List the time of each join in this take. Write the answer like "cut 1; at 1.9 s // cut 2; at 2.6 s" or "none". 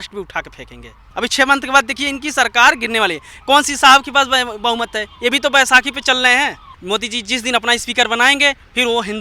cut 1; at 1.1 s // cut 2; at 6.7 s